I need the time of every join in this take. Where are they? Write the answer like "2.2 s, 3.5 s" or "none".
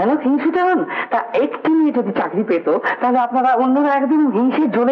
none